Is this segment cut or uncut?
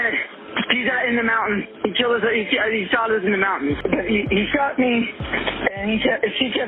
cut